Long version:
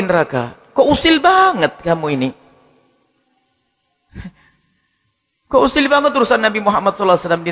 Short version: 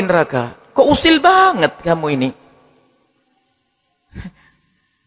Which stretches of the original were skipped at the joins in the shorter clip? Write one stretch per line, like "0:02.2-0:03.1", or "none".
none